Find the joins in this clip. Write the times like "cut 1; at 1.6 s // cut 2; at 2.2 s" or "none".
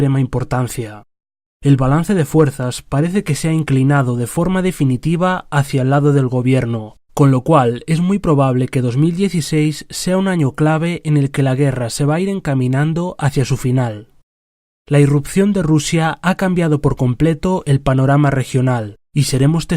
cut 1; at 18.4 s

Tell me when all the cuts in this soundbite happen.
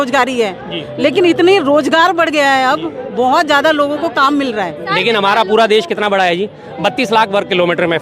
cut 1; at 4.8 s

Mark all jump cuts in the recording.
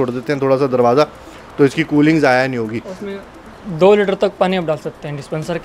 none

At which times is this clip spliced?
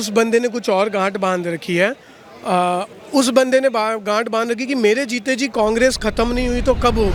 none

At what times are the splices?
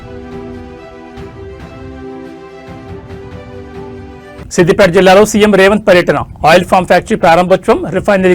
cut 1; at 4.0 s

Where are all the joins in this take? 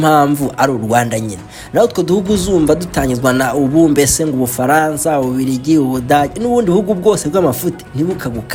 none

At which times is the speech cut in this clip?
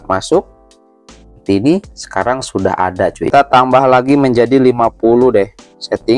cut 1; at 3.3 s

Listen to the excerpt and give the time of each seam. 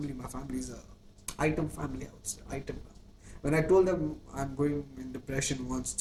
none

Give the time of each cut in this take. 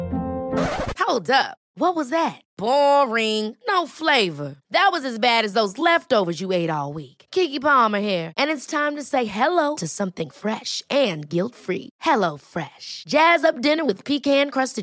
none

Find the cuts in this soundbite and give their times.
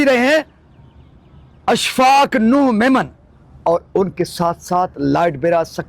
none

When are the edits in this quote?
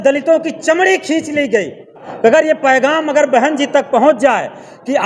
cut 1; at 2.1 s

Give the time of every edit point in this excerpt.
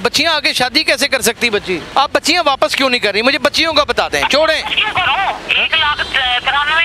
cut 1; at 1.9 s // cut 2; at 5.5 s

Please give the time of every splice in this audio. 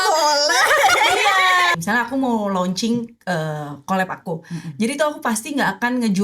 cut 1; at 1.7 s

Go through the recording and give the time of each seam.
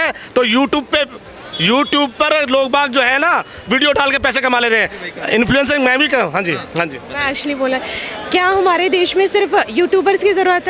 none

